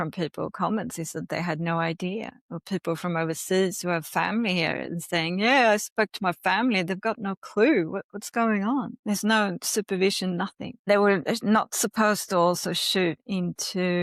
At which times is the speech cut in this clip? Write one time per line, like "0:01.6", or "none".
0:08.9
0:10.9